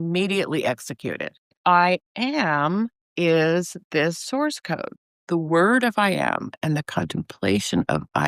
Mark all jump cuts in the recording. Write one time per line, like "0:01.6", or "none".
0:01.6
0:04.9